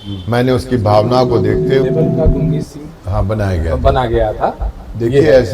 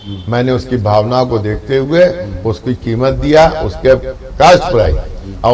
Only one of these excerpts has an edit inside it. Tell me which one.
first; 1 cut; at 1.9 s

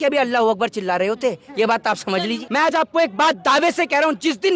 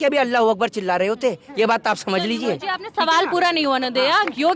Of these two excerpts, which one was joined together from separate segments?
first; 1 cut; at 2.4 s

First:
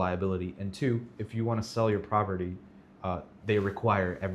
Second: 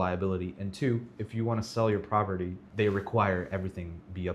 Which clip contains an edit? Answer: second; 1 cut; at 2.6 s

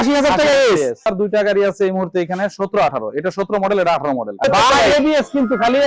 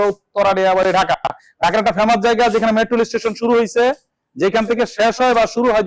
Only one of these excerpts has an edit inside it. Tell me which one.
first; 2 cuts; at 1.1 s, 4.4 s

